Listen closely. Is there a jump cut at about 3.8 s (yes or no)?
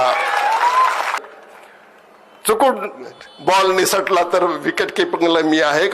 no